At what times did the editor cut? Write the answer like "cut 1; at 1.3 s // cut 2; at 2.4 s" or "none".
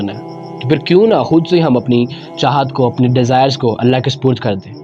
none